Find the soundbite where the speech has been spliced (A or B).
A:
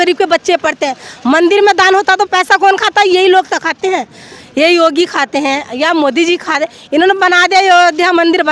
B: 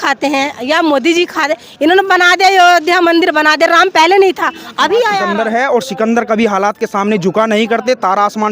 B